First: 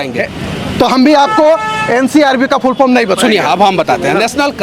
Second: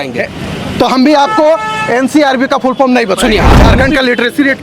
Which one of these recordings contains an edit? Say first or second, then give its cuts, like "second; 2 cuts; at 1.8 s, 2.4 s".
second; 1 cut; at 3.5 s